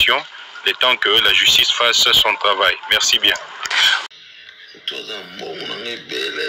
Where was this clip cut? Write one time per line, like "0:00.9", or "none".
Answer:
0:04.0